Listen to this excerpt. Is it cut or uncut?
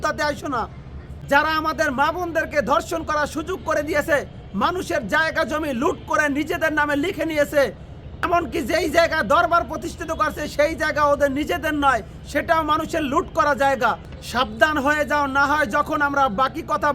cut